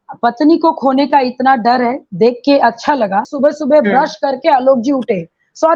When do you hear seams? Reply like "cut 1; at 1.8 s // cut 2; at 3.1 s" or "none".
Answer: cut 1; at 3.3 s